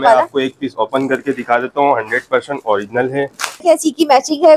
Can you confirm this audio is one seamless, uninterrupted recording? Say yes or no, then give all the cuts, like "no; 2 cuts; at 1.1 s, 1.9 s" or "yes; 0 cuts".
no; 1 cut; at 3.6 s